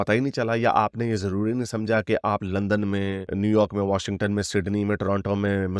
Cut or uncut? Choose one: uncut